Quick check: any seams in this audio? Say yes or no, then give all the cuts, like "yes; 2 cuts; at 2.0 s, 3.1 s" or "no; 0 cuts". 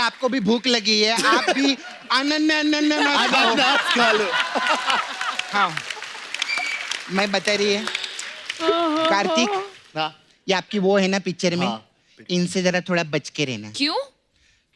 no; 0 cuts